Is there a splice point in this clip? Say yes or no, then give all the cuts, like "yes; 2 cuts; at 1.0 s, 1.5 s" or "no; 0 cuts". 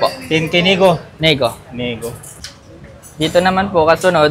yes; 1 cut; at 2.6 s